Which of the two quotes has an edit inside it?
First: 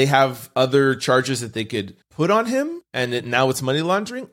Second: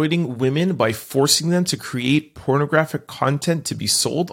first; 2 cuts; at 2.0 s, 2.8 s

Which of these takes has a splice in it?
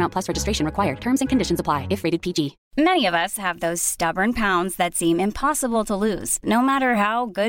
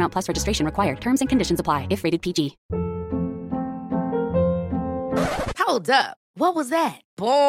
second; 1 cut; at 2.6 s

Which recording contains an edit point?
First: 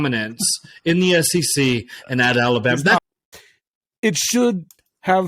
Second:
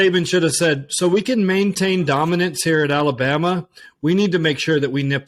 first; 1 cut; at 3.0 s

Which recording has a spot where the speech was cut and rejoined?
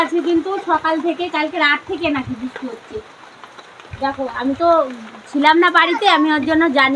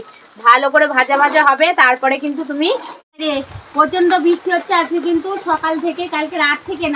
second; 1 cut; at 3.2 s

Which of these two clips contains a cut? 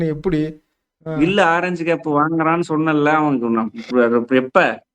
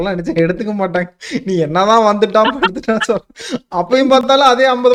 first; 1 cut; at 1.0 s

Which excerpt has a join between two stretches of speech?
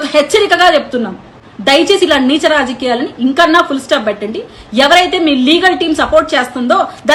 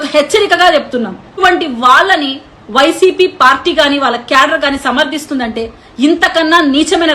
second; 1 cut; at 1.4 s

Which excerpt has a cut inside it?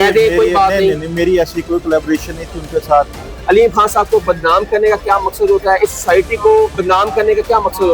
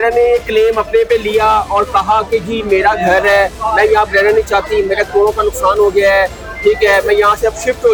first; 2 cuts; at 3.3 s, 6.8 s

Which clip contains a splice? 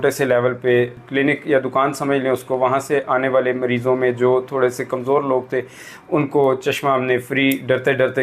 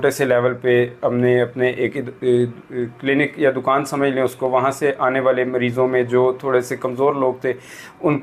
first; 1 cut; at 1.0 s

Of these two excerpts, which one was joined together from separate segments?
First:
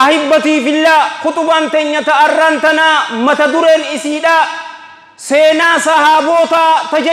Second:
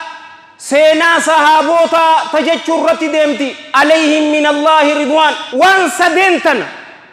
second; 1 cut; at 5.4 s

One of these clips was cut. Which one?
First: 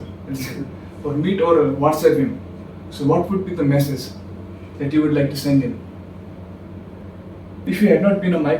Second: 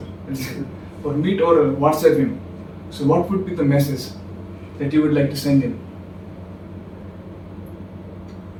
first; 1 cut; at 7.6 s

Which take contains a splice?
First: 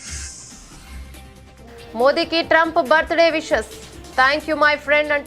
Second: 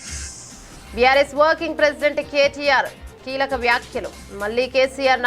second; 1 cut; at 0.9 s

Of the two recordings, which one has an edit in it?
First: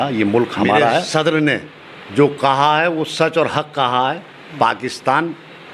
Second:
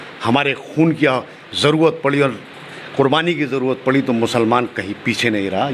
first; 1 cut; at 1.1 s

